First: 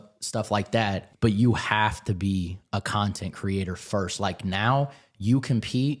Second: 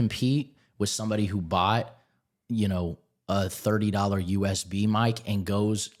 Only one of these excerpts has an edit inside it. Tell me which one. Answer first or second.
first